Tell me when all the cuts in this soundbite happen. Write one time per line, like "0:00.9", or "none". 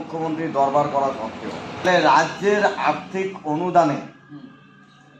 0:01.8